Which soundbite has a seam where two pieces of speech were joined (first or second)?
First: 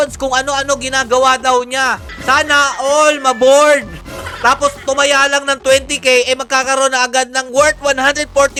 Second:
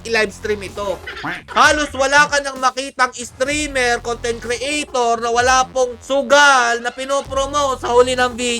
second